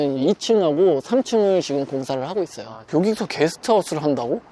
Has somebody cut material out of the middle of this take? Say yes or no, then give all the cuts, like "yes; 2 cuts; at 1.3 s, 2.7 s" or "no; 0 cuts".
yes; 1 cut; at 2.8 s